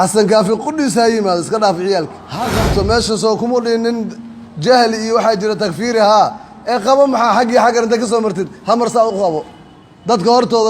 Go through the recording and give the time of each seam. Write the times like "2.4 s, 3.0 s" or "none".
2.6 s